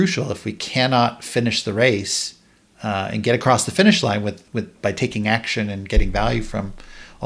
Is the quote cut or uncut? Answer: uncut